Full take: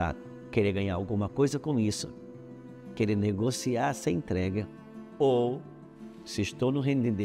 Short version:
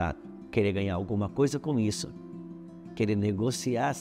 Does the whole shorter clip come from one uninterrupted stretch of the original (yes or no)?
yes